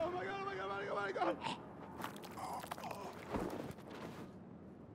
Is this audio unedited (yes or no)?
yes